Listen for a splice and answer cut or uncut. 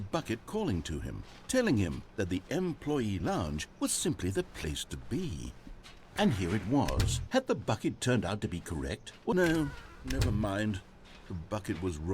cut